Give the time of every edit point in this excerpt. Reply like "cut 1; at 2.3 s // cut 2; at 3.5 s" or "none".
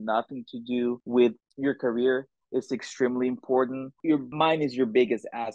cut 1; at 1.0 s // cut 2; at 4.1 s